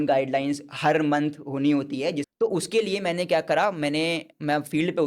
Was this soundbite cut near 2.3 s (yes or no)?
yes